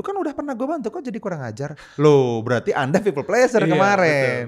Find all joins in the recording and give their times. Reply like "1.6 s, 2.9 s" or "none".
none